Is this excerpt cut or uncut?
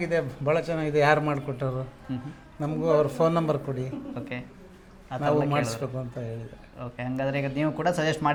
uncut